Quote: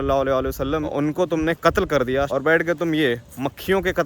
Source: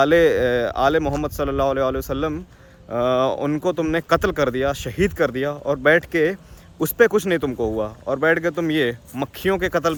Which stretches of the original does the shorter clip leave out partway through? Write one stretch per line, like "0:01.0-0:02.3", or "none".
0:02.4-0:03.4
0:04.8-0:08.1